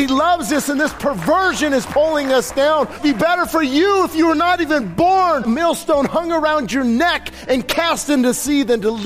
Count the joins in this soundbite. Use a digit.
2